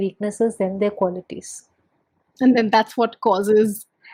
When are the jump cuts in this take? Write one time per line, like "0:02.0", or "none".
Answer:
none